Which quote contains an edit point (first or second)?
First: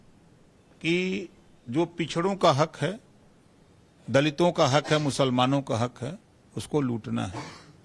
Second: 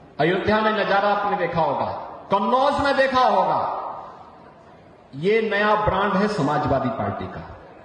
first